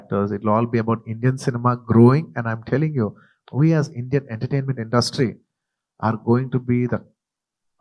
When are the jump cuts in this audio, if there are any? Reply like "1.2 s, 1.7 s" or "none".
3.3 s